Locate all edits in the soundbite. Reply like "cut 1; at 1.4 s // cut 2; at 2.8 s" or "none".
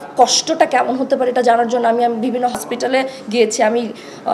cut 1; at 2.6 s

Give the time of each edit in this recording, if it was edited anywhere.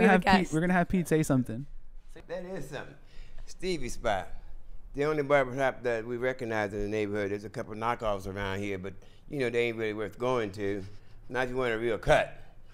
cut 1; at 2.1 s

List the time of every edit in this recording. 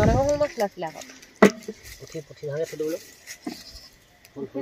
none

